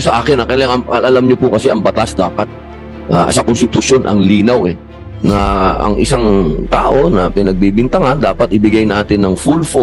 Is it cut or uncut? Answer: uncut